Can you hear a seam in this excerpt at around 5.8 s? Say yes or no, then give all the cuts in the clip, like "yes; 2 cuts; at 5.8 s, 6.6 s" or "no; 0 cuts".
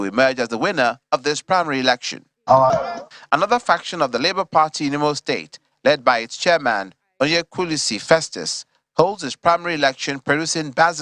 no; 1 cut; at 2.7 s